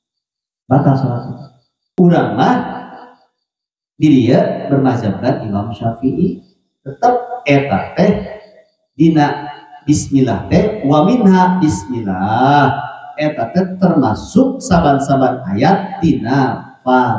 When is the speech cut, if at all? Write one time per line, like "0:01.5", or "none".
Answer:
0:01.9